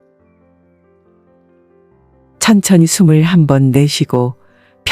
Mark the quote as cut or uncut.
cut